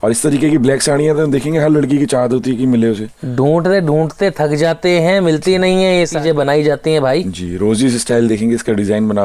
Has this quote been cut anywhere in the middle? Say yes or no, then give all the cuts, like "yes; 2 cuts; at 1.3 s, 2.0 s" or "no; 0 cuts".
yes; 1 cut; at 6.2 s